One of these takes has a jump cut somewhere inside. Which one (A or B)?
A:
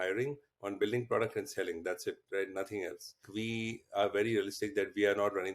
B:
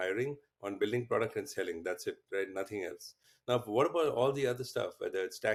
A